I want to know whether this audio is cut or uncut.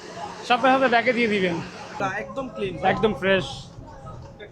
cut